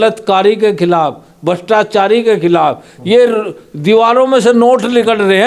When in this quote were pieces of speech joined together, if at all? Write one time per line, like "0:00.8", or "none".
none